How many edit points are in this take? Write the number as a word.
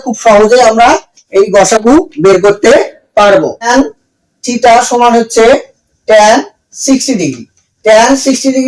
one